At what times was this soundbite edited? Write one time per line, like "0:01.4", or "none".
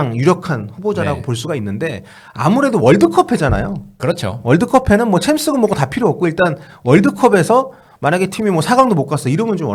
none